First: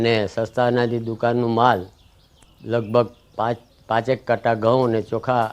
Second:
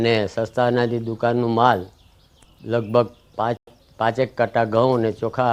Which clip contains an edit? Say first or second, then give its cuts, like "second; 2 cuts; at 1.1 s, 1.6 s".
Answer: first; 1 cut; at 3.7 s